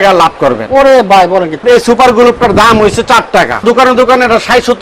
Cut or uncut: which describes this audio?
cut